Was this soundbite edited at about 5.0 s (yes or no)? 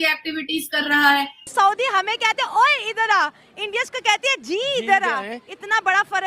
no